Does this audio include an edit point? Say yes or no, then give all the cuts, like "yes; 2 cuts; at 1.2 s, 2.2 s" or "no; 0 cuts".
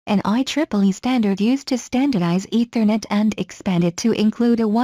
yes; 1 cut; at 1.4 s